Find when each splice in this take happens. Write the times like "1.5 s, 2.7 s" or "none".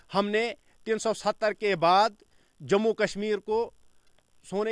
none

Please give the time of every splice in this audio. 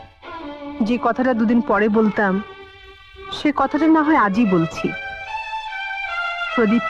none

